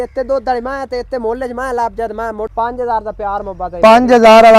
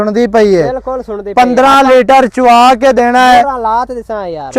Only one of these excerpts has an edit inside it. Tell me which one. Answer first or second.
first